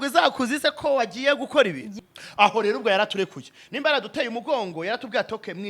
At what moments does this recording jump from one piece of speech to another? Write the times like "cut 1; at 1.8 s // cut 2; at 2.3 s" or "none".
cut 1; at 1.9 s